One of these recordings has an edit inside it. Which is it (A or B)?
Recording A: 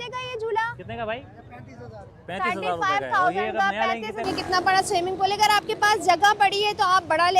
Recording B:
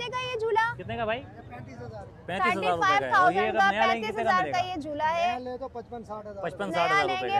A